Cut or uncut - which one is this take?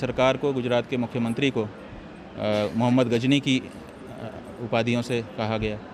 uncut